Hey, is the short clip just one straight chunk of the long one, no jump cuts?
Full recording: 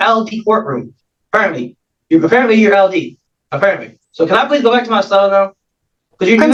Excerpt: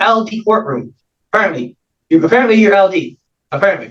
yes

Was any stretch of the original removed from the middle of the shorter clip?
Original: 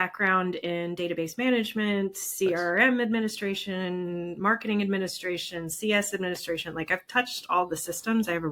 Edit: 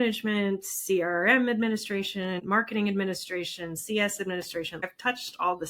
yes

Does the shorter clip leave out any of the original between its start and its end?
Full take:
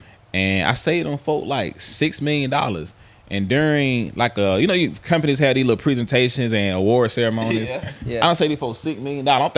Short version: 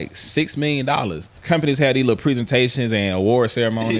yes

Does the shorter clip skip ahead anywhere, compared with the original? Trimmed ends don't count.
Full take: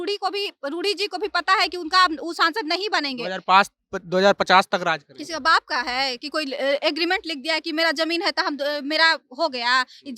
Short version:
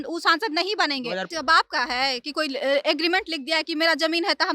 yes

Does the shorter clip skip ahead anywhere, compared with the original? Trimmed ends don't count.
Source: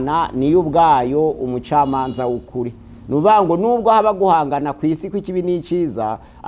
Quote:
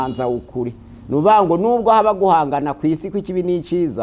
no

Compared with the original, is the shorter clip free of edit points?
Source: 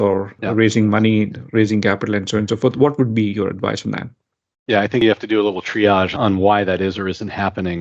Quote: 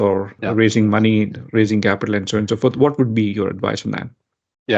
yes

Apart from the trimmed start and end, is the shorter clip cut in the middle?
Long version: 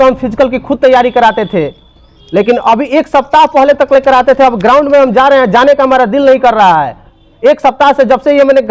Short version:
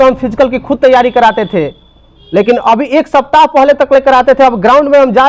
no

